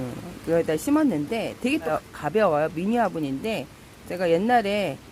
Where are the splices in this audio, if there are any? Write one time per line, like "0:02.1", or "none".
0:01.9